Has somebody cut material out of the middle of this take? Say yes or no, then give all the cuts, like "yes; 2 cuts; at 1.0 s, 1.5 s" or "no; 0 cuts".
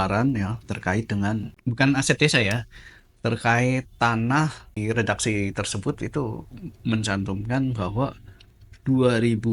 yes; 2 cuts; at 1.6 s, 4.8 s